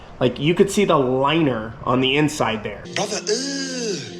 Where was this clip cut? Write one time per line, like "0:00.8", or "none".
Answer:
0:02.8